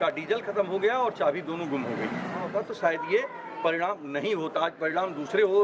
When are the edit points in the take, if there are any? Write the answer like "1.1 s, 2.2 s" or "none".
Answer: 2.4 s